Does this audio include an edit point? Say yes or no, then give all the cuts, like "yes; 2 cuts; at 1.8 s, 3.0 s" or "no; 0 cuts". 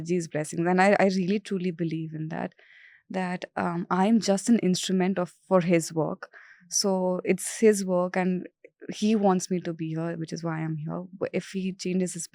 no; 0 cuts